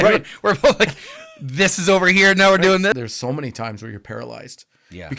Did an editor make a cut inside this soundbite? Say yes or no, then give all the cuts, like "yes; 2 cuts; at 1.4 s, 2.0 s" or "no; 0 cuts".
yes; 1 cut; at 2.9 s